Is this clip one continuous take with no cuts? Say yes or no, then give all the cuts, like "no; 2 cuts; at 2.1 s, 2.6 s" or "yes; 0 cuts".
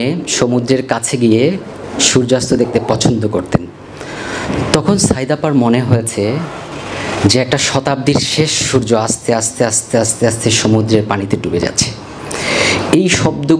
yes; 0 cuts